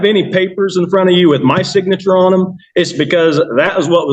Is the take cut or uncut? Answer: uncut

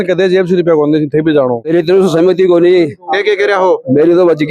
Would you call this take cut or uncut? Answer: cut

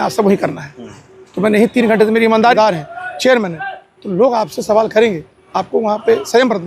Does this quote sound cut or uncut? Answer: cut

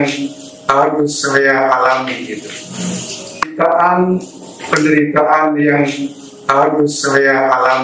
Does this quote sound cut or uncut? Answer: cut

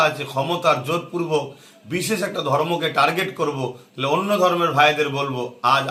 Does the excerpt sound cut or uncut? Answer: uncut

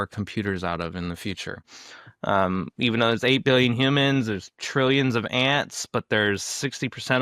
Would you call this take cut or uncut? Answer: cut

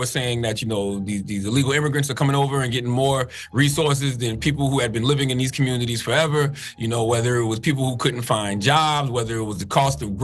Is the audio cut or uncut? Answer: uncut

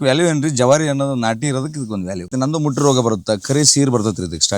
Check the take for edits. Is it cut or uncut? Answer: cut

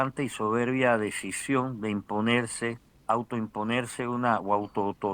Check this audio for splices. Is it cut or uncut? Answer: cut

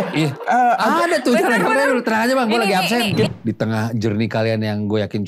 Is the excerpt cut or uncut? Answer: cut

